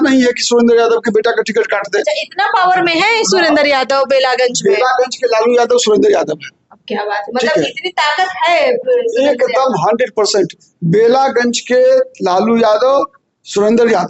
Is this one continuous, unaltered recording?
yes; 0 cuts

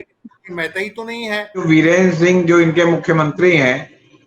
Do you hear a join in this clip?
yes; 1 cut; at 1.6 s

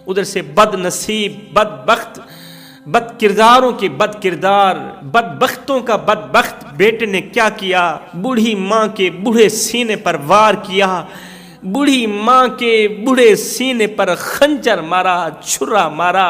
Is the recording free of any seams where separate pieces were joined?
yes; 0 cuts

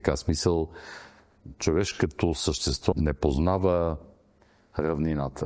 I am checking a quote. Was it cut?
yes; 1 cut; at 2.9 s

